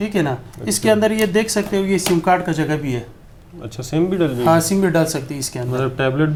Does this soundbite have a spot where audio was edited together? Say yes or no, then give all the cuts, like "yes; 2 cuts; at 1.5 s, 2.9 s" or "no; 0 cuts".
no; 0 cuts